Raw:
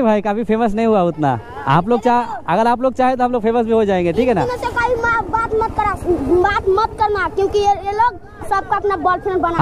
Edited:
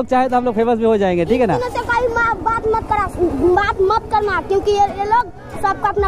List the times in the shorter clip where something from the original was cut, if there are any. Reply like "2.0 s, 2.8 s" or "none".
none